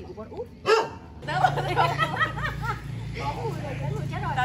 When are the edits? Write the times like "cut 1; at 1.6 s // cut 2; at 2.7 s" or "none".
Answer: cut 1; at 1.2 s